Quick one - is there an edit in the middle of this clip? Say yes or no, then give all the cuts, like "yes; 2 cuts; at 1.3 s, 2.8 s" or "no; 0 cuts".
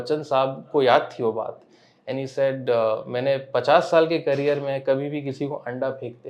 no; 0 cuts